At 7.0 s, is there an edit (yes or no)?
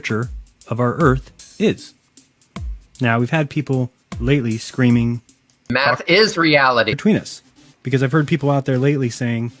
no